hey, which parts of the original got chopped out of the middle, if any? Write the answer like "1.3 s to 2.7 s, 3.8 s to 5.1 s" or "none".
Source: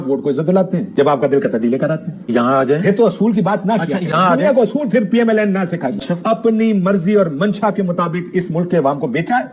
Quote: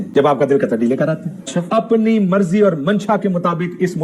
2.2 s to 5.9 s